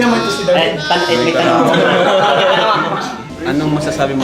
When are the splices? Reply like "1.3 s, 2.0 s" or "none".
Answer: 3.3 s